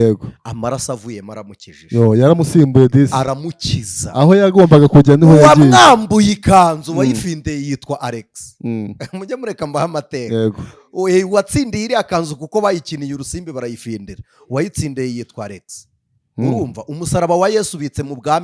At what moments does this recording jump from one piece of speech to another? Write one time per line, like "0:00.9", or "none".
none